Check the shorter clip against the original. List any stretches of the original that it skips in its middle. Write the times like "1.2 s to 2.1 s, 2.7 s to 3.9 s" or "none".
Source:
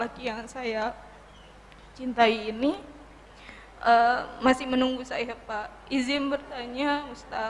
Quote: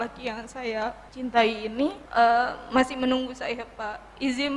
1.1 s to 1.9 s, 2.9 s to 3.7 s